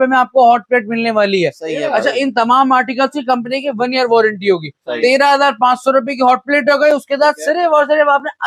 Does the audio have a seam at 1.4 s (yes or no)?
no